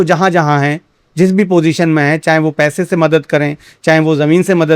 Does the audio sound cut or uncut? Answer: uncut